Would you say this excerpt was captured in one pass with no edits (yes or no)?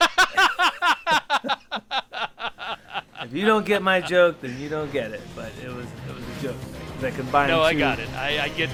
yes